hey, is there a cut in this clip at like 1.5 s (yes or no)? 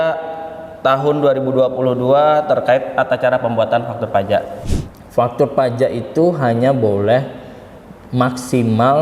no